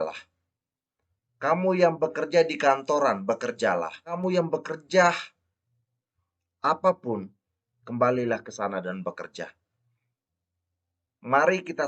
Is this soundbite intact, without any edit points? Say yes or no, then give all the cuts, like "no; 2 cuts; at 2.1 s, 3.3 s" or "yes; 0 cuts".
no; 1 cut; at 4.1 s